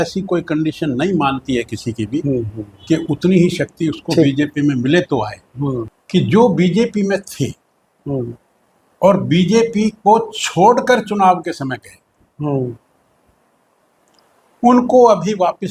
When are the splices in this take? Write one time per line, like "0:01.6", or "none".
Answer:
0:05.9